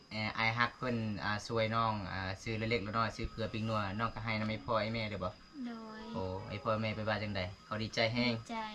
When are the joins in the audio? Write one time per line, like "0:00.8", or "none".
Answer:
none